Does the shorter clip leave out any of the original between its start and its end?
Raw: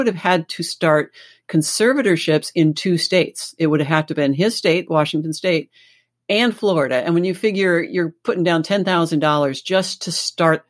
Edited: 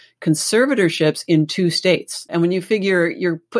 yes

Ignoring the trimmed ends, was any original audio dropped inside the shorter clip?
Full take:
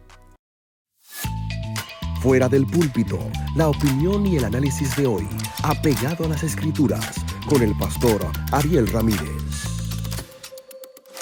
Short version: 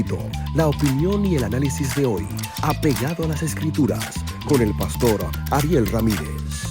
no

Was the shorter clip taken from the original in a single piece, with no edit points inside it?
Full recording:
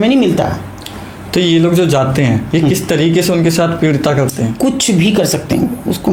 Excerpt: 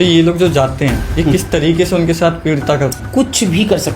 no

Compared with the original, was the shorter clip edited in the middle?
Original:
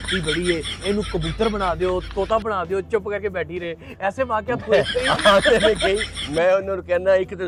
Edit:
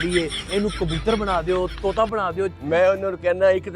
yes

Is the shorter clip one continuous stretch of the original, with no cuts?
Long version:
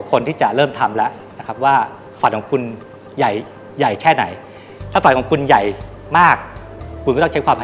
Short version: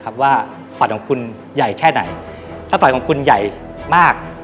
no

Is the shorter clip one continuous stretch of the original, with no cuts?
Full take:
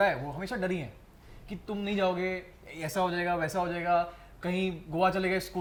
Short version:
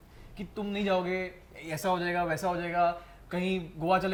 yes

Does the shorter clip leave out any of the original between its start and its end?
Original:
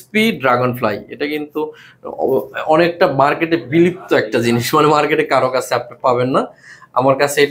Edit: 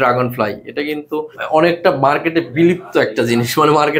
yes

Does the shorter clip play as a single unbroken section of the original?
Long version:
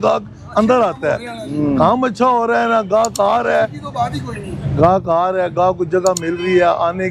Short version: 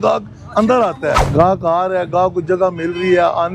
no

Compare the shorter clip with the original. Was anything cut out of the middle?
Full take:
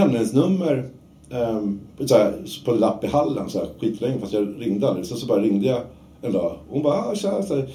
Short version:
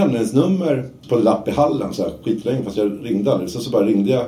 yes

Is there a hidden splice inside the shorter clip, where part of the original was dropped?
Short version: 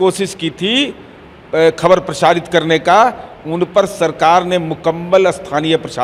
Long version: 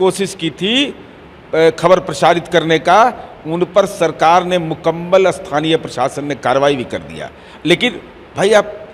no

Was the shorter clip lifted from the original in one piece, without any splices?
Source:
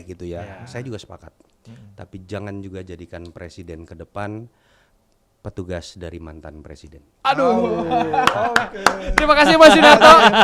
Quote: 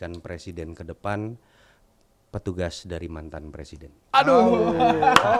yes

